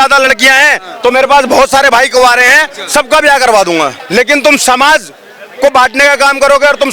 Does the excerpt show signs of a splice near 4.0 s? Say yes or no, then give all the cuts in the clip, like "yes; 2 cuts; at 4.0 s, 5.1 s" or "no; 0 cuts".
yes; 1 cut; at 4.0 s